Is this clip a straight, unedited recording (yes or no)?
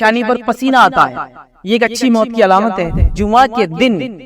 no